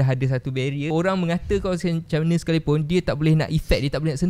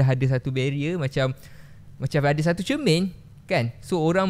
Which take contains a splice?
first; 1 cut; at 0.9 s

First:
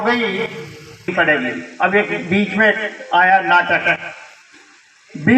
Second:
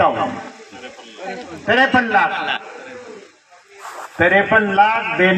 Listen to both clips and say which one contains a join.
first; 1 cut; at 1.1 s

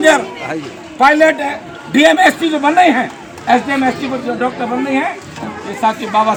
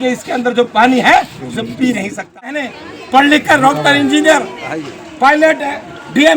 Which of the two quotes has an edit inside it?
second; 1 cut; at 2.6 s

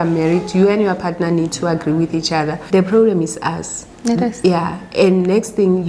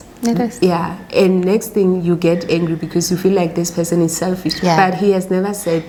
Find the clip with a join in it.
first; 1 cut; at 2.6 s

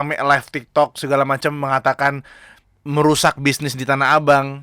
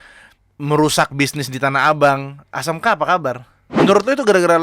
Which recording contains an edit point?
second; 1 cut; at 3.7 s

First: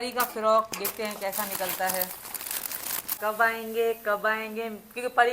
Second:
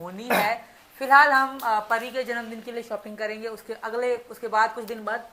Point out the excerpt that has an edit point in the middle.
first; 1 cut; at 3.2 s

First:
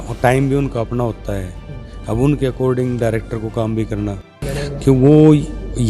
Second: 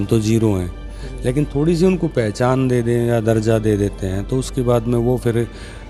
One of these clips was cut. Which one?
first; 1 cut; at 4.5 s

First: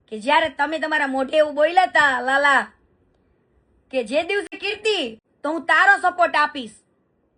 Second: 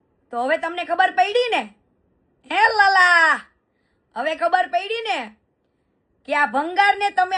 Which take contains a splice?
first; 1 cut; at 5.0 s

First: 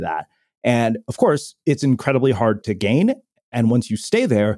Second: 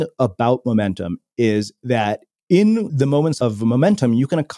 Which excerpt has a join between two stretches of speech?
second; 1 cut; at 3.4 s

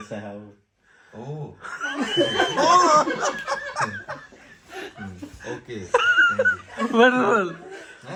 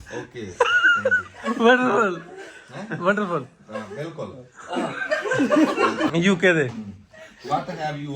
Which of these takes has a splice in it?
second; 1 cut; at 6.0 s

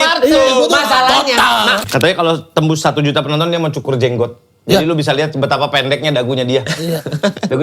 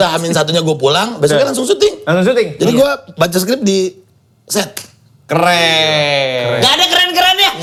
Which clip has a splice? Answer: first; 1 cut; at 1.8 s

